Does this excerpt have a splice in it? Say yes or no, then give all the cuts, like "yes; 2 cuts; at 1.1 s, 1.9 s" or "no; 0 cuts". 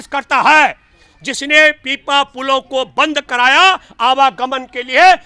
no; 0 cuts